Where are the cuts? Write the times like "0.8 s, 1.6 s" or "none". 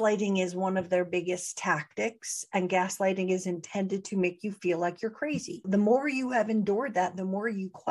5.7 s